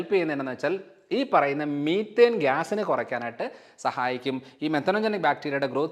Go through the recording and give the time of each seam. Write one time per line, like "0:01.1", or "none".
none